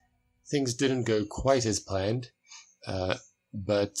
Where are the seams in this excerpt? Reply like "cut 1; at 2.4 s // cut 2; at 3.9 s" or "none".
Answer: none